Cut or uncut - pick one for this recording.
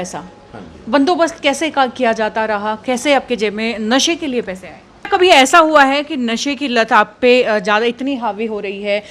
cut